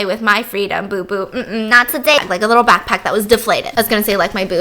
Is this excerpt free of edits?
no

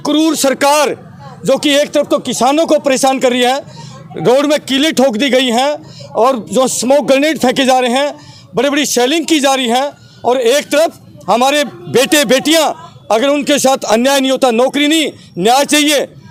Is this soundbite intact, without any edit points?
yes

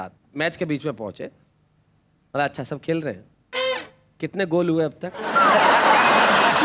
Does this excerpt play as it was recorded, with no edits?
yes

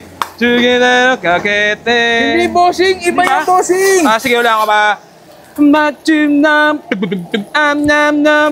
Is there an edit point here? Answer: no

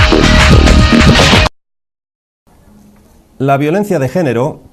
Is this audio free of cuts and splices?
no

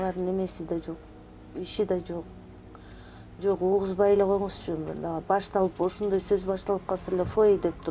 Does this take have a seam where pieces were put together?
no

